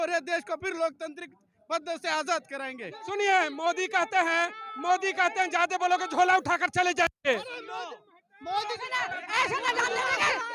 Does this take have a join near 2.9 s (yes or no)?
yes